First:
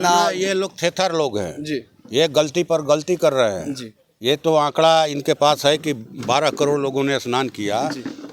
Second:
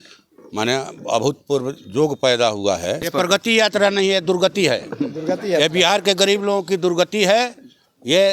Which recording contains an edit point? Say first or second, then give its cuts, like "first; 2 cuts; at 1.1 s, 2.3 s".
second; 1 cut; at 3.1 s